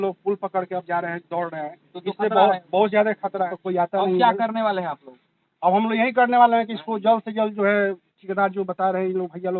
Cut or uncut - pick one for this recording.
cut